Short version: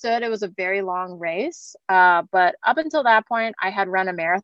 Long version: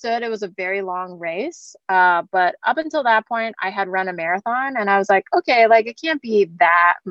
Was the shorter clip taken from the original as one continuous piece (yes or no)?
yes